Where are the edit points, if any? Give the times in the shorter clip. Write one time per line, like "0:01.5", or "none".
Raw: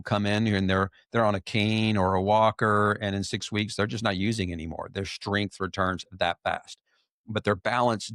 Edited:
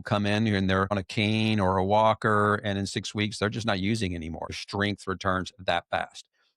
0:00.9
0:04.5